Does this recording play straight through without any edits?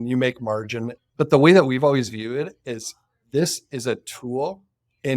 no; 1 cut; at 1.0 s

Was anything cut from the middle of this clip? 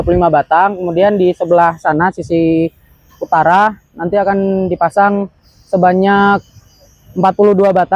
no; 0 cuts

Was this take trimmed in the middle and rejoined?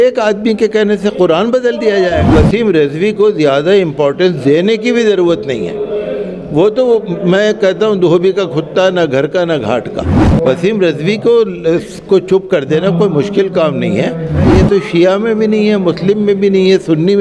yes; 3 cuts; at 2.3 s, 10.1 s, 14.5 s

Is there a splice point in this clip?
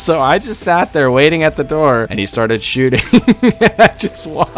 yes; 1 cut; at 2.1 s

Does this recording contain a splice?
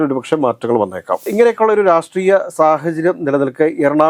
yes; 1 cut; at 1.3 s

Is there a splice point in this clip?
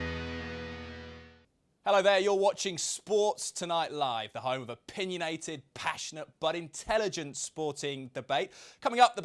yes; 1 cut; at 1.2 s

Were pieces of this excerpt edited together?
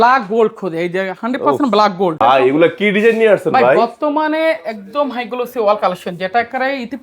yes; 1 cut; at 2.2 s

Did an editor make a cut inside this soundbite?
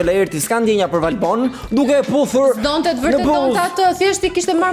no; 0 cuts

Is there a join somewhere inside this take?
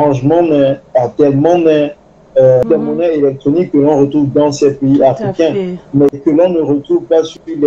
no; 0 cuts

